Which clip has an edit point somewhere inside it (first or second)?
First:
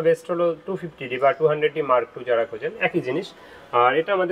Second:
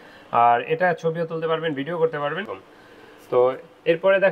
second